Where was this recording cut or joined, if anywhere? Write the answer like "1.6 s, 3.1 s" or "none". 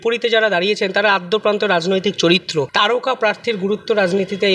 2.7 s

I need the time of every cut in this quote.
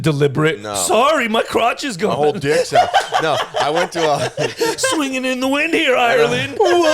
none

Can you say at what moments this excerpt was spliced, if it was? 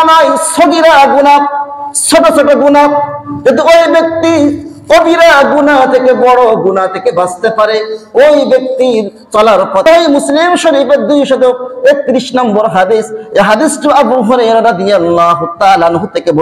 9.8 s

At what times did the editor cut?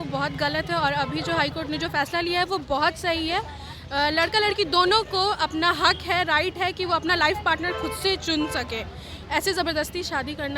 none

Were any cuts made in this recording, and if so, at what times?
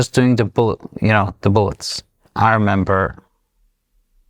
2.2 s

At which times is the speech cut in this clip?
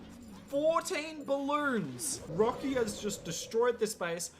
2.2 s

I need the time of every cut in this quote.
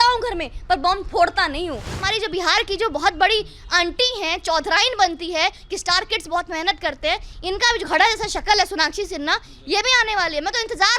1.9 s

